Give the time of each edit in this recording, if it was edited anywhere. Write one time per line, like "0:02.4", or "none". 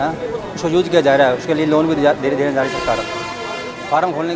none